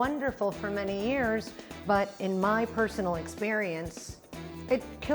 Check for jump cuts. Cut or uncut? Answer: uncut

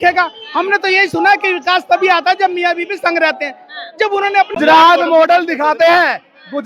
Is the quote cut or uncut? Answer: cut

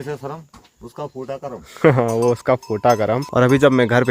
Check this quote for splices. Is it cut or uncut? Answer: uncut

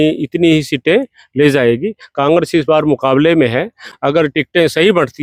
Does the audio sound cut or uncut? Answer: uncut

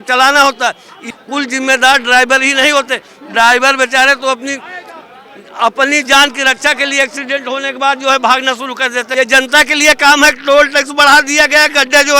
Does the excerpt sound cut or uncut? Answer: cut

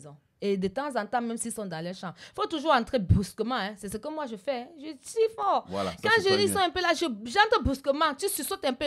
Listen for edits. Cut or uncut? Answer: uncut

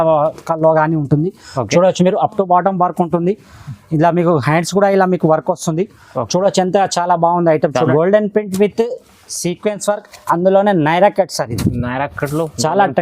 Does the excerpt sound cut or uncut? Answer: cut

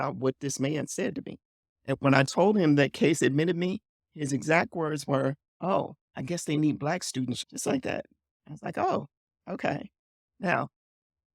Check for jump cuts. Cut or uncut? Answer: cut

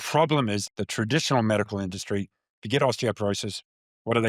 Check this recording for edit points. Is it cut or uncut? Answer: uncut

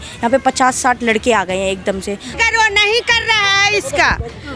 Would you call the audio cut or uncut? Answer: cut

